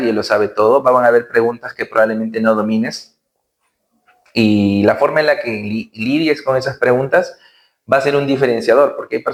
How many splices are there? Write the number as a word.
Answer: zero